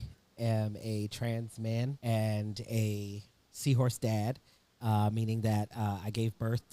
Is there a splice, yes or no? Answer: yes